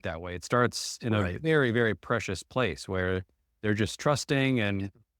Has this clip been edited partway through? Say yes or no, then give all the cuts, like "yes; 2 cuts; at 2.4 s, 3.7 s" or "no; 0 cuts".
no; 0 cuts